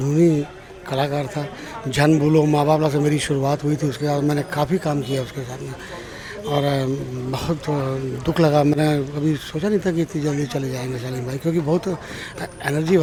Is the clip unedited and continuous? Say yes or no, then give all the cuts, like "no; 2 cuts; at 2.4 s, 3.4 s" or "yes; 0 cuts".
yes; 0 cuts